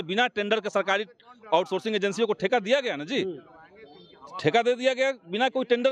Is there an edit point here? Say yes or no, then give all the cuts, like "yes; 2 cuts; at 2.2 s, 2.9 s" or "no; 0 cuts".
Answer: no; 0 cuts